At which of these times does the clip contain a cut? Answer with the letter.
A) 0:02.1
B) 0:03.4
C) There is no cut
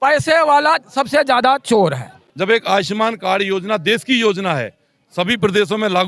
A